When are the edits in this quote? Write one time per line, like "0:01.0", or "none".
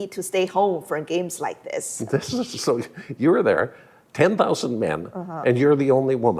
none